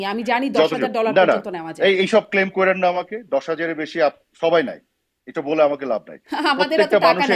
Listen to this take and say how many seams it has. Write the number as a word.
zero